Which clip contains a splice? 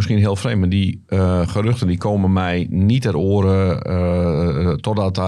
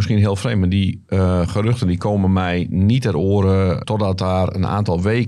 second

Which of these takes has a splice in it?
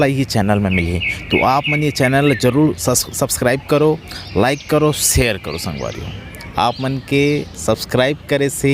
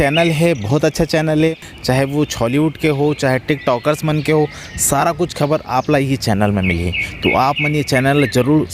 second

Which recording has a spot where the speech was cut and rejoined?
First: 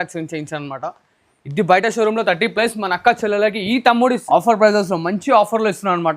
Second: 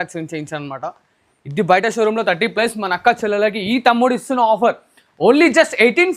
first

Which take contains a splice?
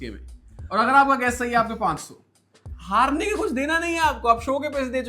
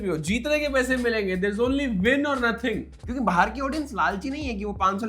second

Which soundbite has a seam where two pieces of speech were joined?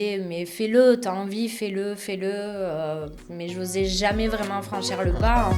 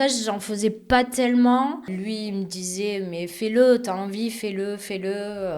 second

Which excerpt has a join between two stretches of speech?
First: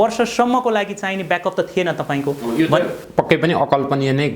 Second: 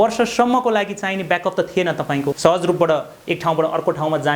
second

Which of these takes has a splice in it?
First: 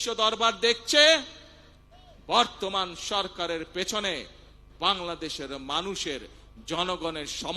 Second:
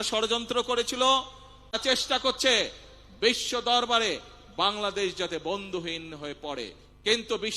second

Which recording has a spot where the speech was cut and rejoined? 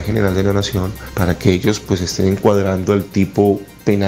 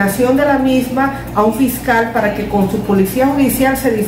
first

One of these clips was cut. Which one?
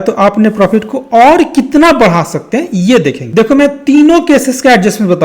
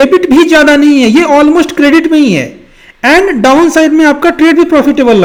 first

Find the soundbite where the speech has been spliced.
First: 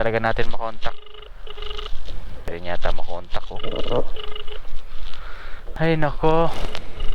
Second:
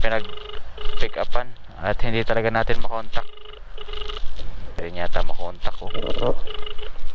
first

